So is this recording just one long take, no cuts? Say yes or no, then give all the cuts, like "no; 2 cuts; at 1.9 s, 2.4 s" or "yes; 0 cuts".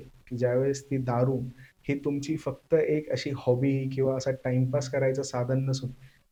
yes; 0 cuts